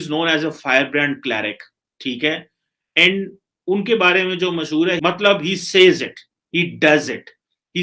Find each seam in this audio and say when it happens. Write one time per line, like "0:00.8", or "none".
0:05.0